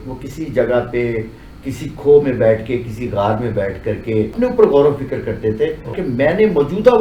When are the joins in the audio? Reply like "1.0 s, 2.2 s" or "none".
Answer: 4.3 s, 5.9 s